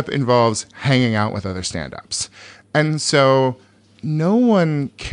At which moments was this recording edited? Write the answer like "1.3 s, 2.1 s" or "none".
none

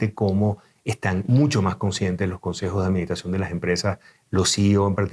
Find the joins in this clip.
none

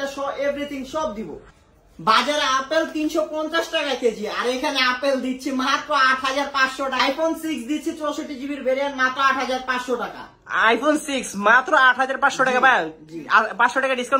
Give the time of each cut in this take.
1.5 s, 7.0 s

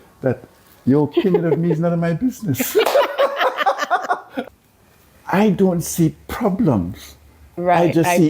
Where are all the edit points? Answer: 4.4 s

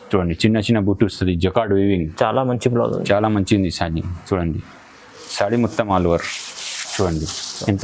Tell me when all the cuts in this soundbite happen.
none

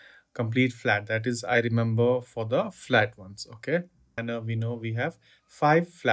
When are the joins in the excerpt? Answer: 4.2 s

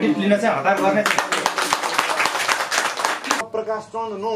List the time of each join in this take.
3.4 s

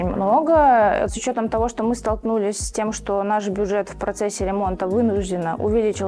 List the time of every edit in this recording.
1.1 s

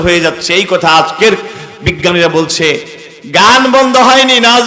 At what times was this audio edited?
2.9 s

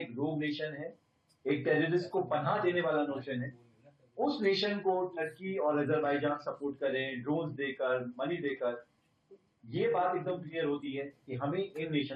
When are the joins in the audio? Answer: none

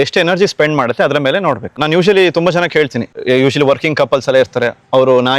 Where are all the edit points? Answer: 1.8 s, 3.1 s

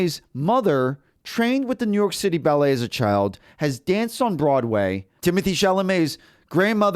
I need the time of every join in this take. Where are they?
none

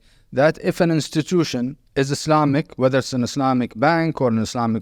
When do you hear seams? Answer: 1.8 s

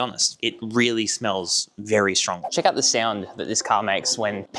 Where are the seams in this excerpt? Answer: 2.4 s

